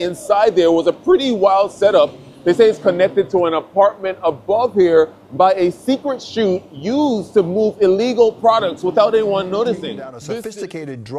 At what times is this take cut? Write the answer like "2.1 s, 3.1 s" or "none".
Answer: 10.1 s